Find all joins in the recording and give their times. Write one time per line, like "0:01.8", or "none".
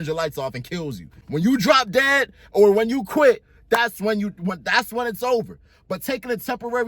0:01.1